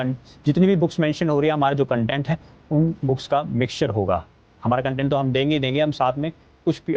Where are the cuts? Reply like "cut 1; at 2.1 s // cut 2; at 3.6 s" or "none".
cut 1; at 4.6 s